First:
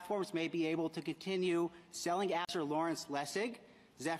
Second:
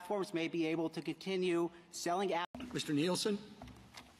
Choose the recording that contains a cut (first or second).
second